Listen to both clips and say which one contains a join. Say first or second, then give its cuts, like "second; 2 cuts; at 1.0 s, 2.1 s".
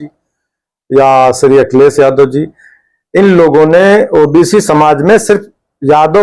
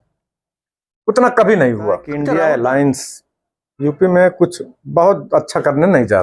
second; 1 cut; at 2.1 s